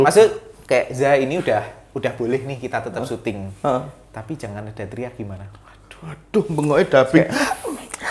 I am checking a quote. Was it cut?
no; 0 cuts

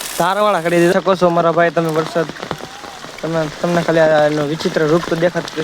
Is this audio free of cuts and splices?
no; 1 cut; at 0.9 s

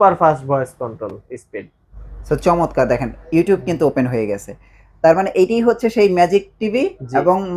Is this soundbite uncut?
yes; 0 cuts

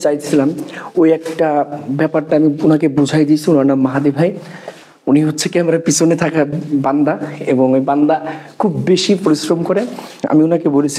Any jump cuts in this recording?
no; 0 cuts

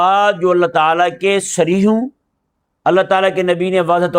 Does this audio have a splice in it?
no; 0 cuts

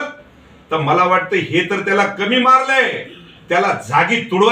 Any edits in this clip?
no; 0 cuts

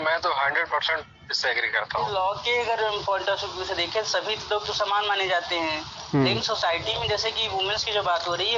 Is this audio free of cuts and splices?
no; 1 cut; at 2.1 s

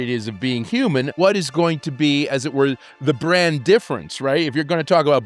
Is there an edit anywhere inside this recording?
yes; 1 cut; at 1.2 s

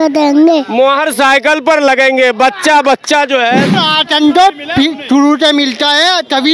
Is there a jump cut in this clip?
yes; 1 cut; at 3.7 s

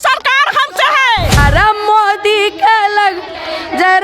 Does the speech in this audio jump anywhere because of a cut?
yes; 1 cut; at 1.3 s

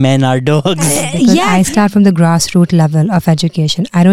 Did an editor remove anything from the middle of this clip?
yes; 1 cut; at 1.5 s

